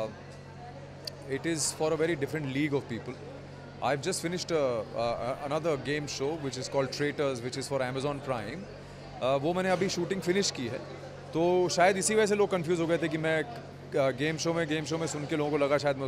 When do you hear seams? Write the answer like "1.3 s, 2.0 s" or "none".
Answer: none

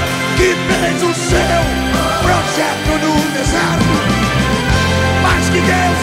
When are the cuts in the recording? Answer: none

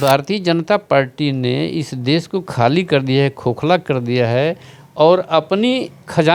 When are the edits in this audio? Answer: none

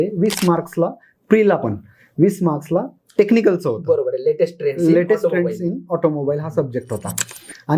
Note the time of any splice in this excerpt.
none

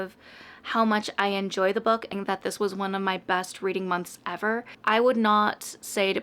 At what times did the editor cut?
2.1 s, 4.7 s

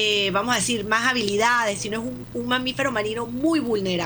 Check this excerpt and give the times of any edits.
2.2 s

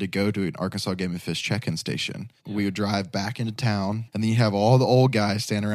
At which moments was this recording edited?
2.4 s, 4.1 s

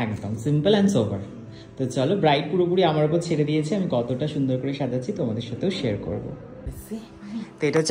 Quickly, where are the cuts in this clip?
6.7 s

